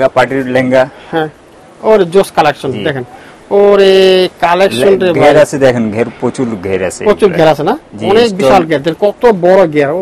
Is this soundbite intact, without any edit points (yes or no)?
yes